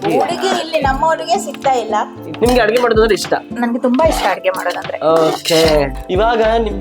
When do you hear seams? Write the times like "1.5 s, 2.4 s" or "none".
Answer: 2.3 s, 5.9 s